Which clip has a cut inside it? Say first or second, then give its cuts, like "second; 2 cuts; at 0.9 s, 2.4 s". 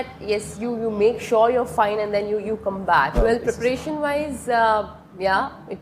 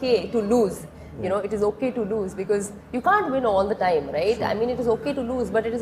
first; 1 cut; at 3.1 s